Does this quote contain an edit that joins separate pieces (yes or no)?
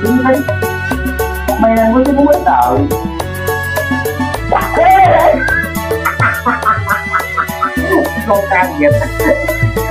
no